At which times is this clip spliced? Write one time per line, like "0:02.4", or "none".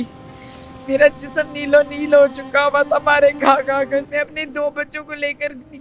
0:04.1